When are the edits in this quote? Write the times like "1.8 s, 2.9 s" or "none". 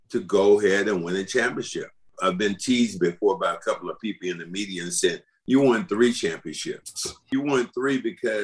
2.1 s, 5.3 s, 7.3 s